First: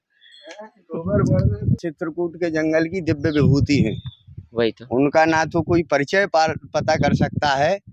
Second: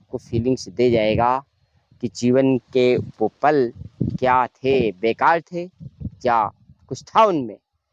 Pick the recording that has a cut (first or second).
first